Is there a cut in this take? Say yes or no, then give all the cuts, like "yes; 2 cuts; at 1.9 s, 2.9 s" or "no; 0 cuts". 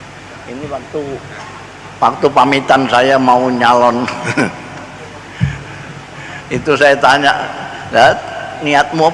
no; 0 cuts